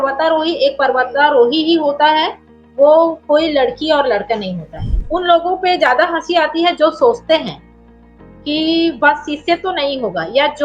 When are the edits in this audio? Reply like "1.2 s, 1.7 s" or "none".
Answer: 5.0 s